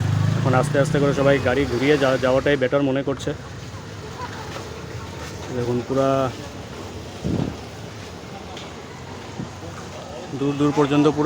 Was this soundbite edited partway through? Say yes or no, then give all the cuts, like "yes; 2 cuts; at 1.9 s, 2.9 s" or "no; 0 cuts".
no; 0 cuts